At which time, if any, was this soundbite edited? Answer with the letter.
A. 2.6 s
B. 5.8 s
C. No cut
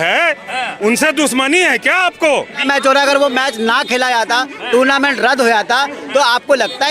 A